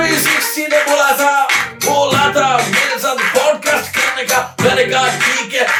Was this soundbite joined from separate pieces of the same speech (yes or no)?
no